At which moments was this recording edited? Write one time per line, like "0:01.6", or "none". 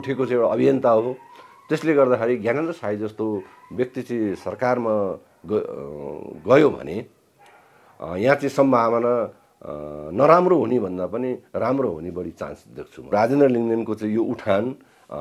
0:13.1